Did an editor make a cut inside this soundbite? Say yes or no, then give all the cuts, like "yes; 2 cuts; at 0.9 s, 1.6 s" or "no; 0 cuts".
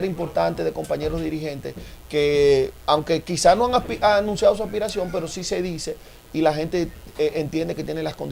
no; 0 cuts